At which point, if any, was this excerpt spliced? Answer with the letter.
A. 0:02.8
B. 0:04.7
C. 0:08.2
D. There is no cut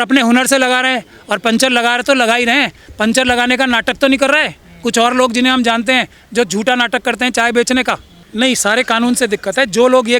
C